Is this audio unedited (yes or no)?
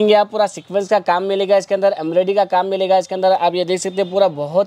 yes